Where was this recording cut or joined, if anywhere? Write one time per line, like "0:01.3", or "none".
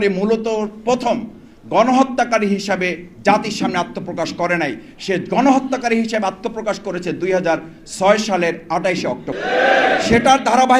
0:09.3